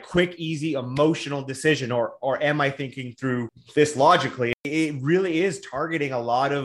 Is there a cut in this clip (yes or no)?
yes